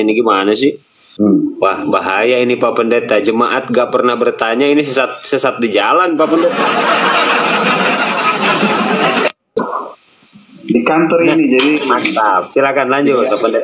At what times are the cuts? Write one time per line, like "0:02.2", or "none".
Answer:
0:01.1
0:09.5

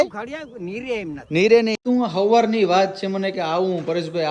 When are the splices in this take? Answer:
0:01.8

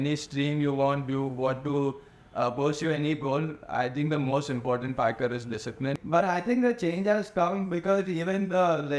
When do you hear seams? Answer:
0:06.0

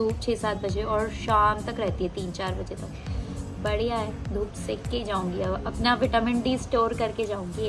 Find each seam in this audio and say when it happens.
none

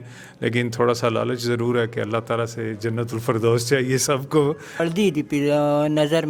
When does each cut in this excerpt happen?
0:04.8

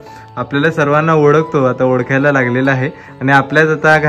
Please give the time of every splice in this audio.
none

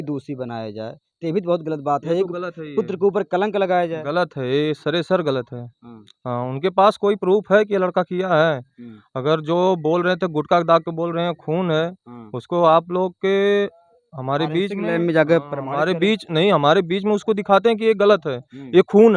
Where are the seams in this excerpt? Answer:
none

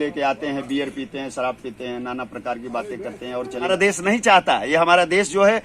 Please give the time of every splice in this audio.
0:03.7

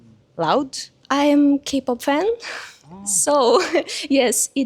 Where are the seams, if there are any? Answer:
0:01.0

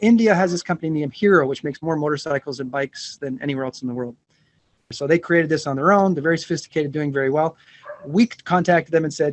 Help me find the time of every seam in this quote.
0:05.0

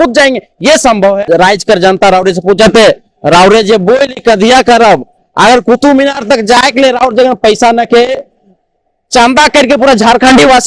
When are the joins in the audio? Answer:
0:01.2

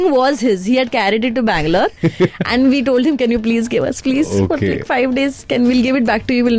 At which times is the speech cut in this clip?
none

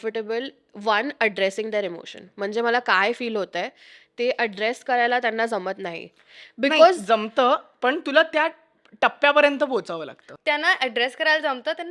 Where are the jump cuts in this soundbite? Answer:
0:10.1

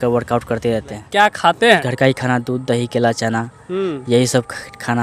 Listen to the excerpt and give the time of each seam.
0:01.0
0:01.9

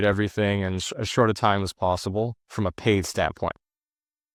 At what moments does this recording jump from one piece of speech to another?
none

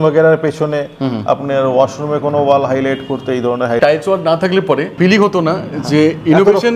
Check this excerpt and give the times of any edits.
0:03.8
0:04.9

